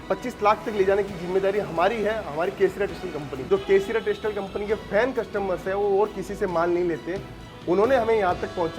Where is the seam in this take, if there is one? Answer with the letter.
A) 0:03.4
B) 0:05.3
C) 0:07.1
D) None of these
A